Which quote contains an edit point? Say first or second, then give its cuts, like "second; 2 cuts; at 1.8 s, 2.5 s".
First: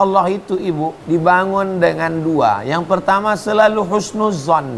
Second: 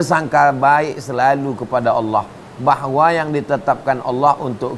first; 1 cut; at 1.0 s